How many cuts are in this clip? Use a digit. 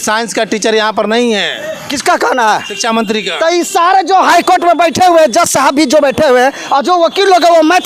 0